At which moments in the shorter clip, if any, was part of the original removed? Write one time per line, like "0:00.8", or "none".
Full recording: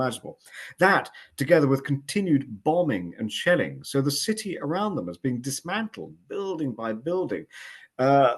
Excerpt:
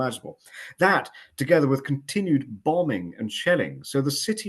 none